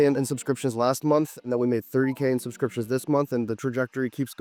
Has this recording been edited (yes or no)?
no